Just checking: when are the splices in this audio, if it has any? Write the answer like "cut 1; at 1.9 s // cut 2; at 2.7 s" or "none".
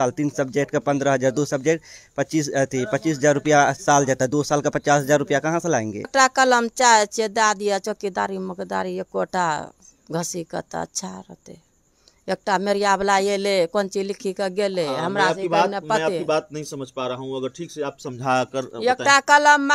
cut 1; at 6.1 s